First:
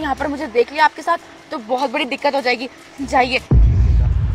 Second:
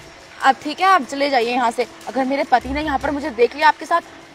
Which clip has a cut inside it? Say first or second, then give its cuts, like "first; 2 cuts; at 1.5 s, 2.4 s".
first; 1 cut; at 3.5 s